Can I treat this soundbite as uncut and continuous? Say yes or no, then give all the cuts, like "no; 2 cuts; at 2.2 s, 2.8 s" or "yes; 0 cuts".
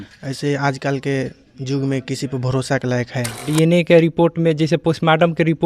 no; 1 cut; at 3.5 s